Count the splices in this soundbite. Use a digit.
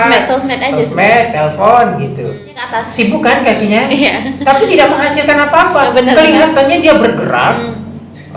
1